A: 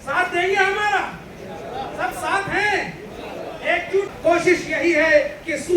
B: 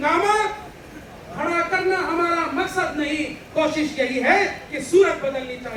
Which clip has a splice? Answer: A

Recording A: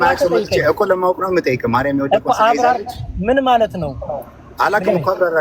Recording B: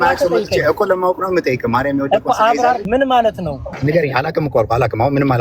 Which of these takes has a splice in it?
B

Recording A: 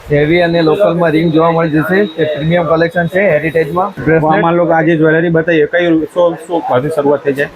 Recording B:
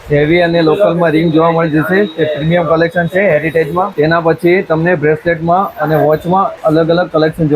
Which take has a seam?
B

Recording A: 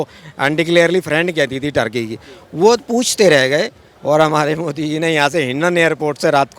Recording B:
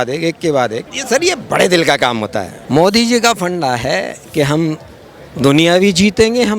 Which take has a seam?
B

